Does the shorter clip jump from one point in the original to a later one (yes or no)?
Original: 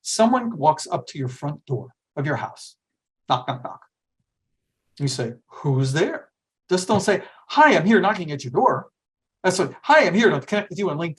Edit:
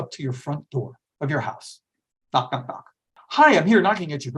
yes